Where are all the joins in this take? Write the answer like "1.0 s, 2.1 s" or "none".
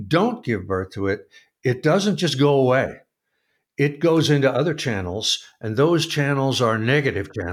none